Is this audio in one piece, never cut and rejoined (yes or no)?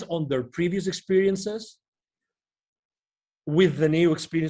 yes